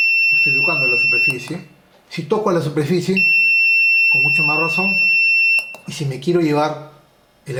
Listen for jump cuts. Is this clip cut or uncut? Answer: uncut